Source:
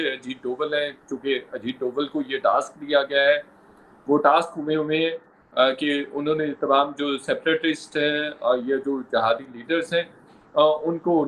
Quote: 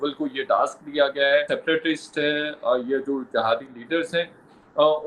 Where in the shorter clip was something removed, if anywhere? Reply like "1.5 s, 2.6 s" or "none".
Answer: 1.5 s